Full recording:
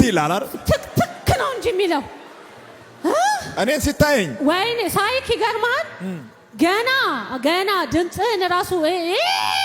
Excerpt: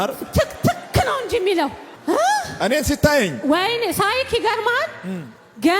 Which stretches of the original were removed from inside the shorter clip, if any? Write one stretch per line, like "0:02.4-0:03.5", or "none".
0:02.2-0:02.8